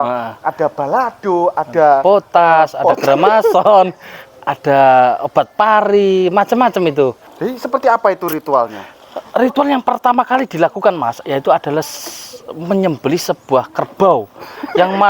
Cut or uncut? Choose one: cut